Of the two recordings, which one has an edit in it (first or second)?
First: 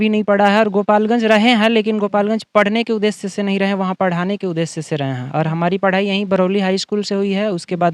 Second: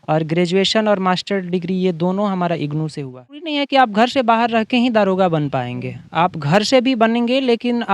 second